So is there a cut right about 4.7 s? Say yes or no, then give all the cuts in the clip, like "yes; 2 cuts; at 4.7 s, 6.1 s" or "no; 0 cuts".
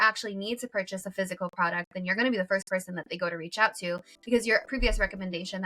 yes; 1 cut; at 4.7 s